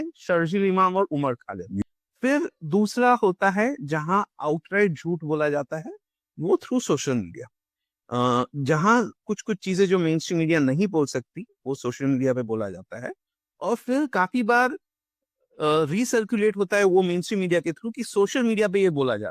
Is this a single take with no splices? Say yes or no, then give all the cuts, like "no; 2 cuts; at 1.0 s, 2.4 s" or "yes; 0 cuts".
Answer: no; 1 cut; at 1.8 s